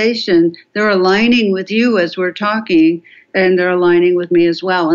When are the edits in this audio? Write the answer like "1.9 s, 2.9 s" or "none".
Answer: 3.2 s